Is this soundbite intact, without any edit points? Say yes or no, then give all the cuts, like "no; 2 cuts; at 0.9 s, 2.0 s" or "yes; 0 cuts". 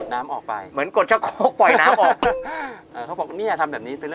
no; 1 cut; at 2.8 s